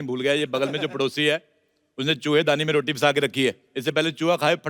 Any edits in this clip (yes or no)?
yes